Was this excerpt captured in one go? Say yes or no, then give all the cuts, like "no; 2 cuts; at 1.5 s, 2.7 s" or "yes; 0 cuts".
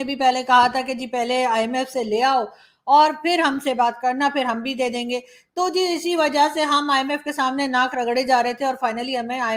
yes; 0 cuts